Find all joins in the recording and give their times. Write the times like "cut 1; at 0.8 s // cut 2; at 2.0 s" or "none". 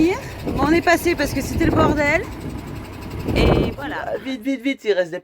cut 1; at 4.2 s